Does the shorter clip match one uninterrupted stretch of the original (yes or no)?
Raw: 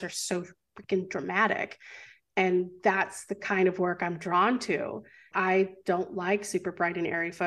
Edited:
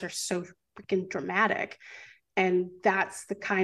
yes